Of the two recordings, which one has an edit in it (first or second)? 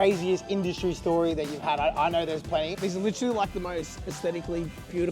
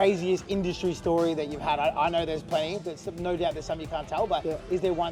first